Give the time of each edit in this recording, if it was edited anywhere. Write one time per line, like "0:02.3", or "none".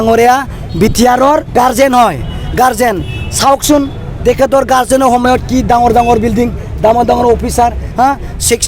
0:01.5